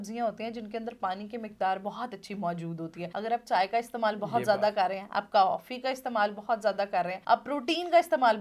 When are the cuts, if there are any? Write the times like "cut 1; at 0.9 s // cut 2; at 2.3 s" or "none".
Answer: cut 1; at 3.0 s // cut 2; at 7.2 s